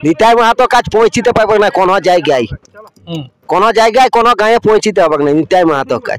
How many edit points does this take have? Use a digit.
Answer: 0